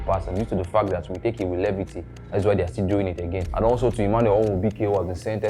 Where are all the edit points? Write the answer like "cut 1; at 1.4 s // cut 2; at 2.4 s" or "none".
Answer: cut 1; at 3.4 s